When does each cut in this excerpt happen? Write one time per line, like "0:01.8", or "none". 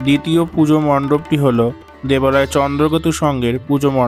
none